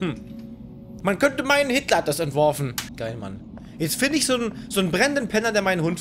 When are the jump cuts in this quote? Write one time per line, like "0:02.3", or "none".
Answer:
0:02.9